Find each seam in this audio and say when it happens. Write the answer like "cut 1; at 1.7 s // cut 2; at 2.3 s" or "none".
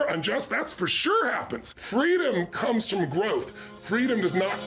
cut 1; at 1.8 s